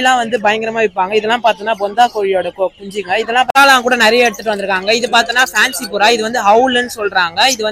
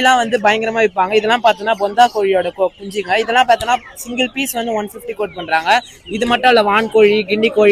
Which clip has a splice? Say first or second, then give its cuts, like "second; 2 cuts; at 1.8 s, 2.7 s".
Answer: first; 1 cut; at 3.6 s